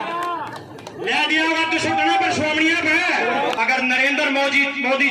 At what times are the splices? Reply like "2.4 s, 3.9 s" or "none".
3.6 s

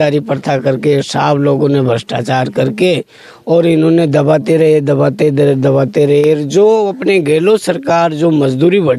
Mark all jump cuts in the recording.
none

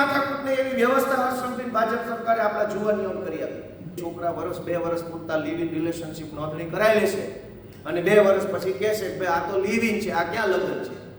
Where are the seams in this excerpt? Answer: 4.0 s

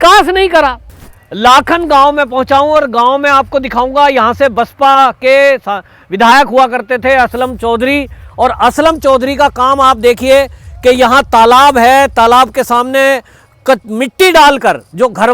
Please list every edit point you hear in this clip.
1.3 s

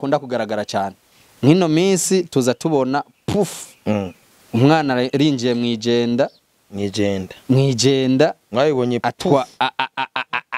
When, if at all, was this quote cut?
none

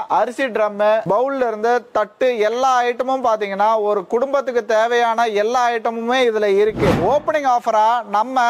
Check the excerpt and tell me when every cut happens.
1.0 s, 7.0 s

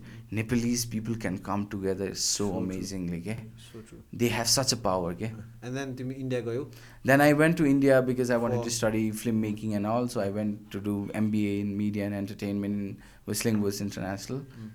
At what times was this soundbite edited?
none

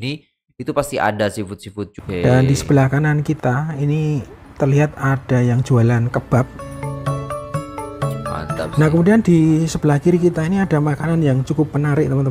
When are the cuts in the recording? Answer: 1.9 s

